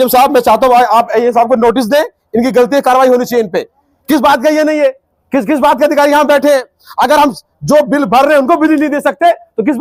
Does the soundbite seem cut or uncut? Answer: uncut